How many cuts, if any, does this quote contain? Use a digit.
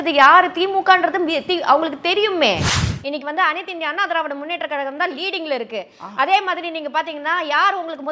1